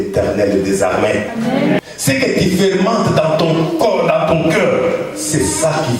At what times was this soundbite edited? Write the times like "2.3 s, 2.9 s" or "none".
1.8 s